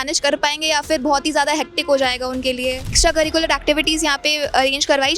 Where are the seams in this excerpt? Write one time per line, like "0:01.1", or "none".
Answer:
0:02.9